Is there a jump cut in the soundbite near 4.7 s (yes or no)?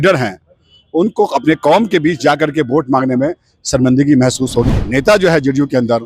yes